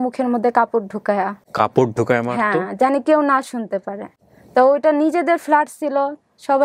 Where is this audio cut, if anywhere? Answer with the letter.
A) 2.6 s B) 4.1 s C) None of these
C